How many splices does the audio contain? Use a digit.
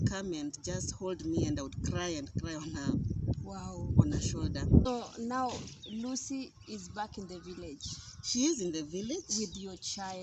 1